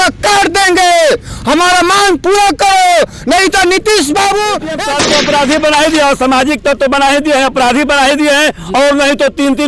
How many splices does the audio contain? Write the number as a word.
one